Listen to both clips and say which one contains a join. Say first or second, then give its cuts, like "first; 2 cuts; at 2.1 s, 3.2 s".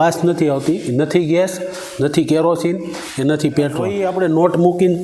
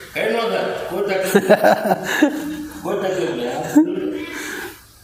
first; 1 cut; at 4.0 s